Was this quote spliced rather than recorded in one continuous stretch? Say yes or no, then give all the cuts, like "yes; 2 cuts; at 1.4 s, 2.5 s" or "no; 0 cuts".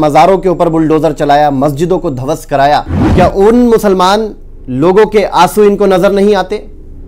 yes; 1 cut; at 3.0 s